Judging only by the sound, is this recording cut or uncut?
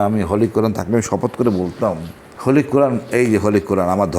cut